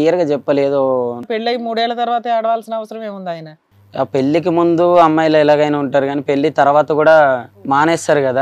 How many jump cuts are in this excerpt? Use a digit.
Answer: 3